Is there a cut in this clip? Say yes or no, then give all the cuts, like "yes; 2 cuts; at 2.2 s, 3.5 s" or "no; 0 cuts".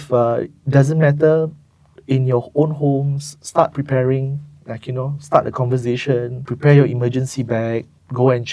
yes; 1 cut; at 6.4 s